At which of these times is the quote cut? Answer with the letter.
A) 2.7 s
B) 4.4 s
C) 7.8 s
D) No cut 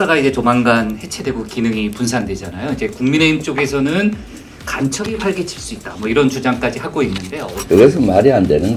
D